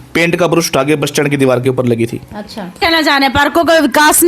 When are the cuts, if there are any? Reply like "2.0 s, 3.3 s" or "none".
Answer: 2.8 s